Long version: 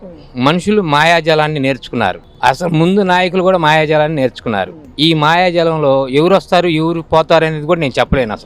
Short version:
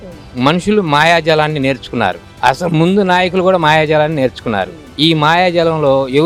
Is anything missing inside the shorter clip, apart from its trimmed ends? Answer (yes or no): no